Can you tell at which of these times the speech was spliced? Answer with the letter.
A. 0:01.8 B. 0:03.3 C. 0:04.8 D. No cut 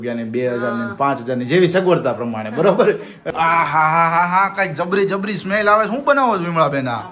B